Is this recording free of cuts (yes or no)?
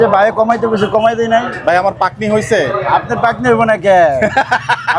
yes